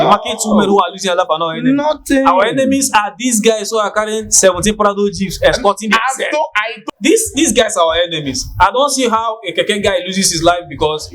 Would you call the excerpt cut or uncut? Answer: cut